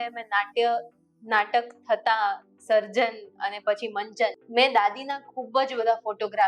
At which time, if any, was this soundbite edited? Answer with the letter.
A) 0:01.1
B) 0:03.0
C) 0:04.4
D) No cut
C